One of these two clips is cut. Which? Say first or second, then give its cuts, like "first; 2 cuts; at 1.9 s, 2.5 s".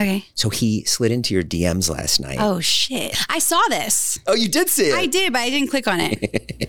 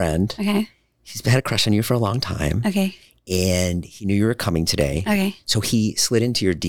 first; 1 cut; at 3.1 s